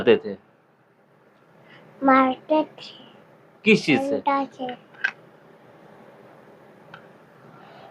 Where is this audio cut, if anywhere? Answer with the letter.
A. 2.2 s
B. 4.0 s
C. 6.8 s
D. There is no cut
B